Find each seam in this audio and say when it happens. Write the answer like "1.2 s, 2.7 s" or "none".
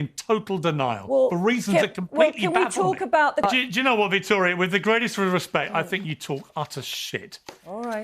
3.5 s